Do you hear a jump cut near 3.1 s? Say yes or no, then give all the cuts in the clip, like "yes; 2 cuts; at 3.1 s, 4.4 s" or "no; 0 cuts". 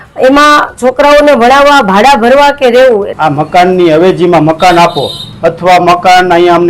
yes; 1 cut; at 3.1 s